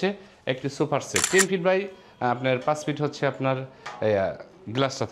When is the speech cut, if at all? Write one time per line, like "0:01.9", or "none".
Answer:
0:01.3

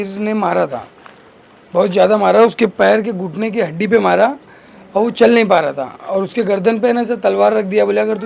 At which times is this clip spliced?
none

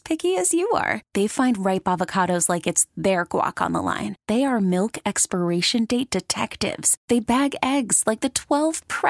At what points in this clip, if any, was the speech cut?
none

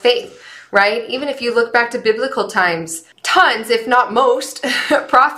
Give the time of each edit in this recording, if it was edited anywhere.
none

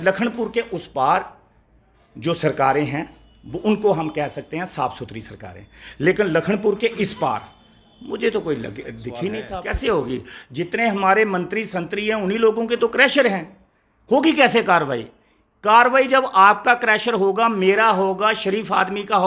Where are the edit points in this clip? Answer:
0:09.4

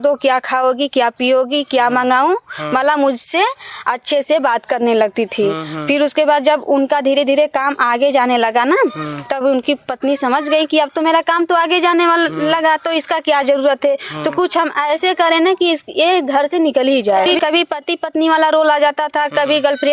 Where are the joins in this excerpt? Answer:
0:17.3

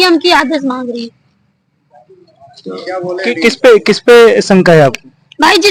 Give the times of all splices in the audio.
none

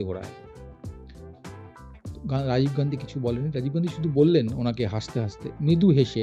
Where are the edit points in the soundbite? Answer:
none

